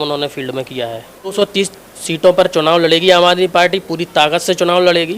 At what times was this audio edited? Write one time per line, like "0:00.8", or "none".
0:01.3